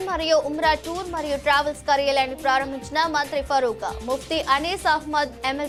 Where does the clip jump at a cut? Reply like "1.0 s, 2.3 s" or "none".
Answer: none

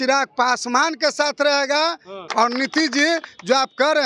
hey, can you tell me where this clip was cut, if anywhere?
2.2 s

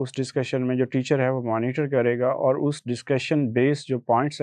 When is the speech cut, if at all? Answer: none

